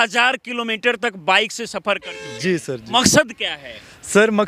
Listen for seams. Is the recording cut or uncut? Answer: uncut